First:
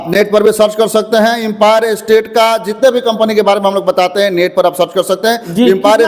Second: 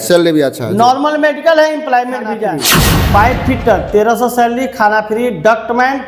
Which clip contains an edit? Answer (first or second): second